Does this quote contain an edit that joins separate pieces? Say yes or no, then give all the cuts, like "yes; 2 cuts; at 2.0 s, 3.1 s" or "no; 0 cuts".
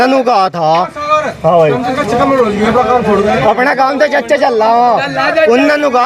no; 0 cuts